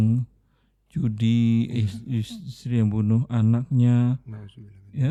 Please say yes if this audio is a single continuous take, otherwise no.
yes